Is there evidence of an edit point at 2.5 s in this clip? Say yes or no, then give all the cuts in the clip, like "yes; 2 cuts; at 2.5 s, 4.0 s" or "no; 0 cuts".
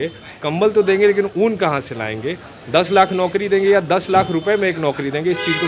no; 0 cuts